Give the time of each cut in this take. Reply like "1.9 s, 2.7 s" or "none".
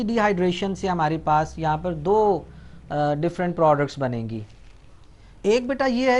none